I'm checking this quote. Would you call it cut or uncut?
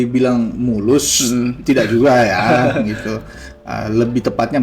uncut